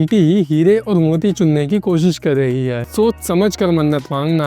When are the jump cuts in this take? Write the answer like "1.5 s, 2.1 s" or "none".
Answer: 2.9 s